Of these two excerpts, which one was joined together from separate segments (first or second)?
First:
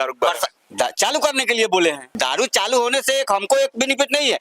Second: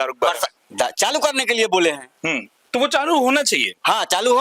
first